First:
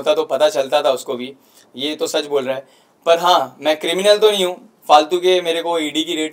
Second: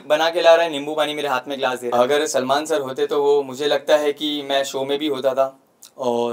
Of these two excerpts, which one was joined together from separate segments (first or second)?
second